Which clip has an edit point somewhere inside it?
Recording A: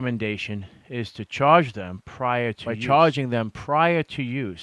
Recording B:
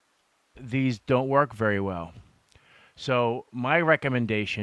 A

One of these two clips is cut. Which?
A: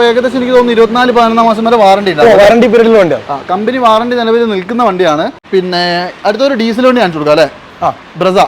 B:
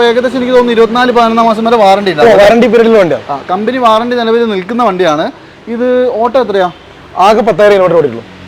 A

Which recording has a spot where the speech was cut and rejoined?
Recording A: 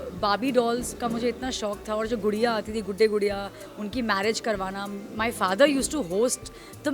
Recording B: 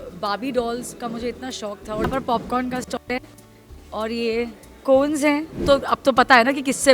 B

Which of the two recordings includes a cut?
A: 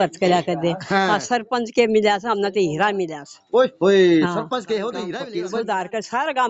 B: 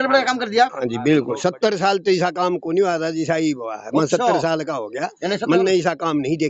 A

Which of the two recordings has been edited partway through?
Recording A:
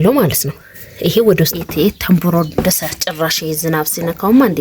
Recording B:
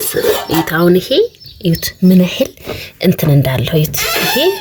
A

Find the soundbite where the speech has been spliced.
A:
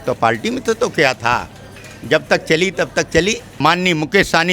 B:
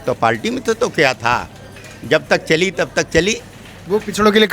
A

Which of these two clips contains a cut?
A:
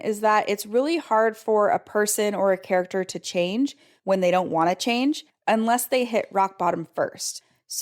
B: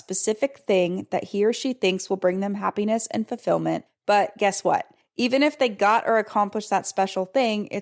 B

